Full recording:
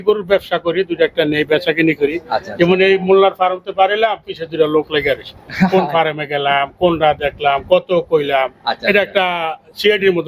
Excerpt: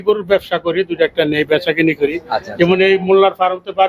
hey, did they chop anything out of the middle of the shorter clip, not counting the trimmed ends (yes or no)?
no